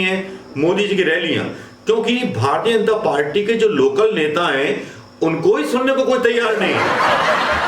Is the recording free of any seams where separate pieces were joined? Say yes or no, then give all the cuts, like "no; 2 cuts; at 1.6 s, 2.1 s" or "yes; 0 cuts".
no; 1 cut; at 6.8 s